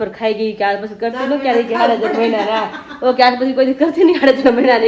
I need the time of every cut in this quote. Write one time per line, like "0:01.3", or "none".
none